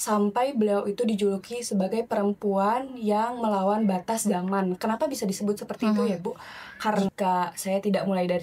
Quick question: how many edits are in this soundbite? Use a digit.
1